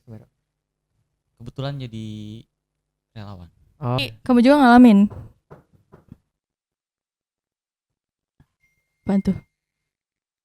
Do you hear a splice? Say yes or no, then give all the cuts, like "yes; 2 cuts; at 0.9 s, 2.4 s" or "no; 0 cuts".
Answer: yes; 1 cut; at 4.0 s